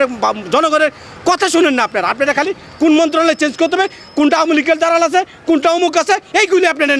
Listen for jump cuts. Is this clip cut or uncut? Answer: uncut